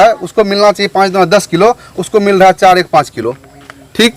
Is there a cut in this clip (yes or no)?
no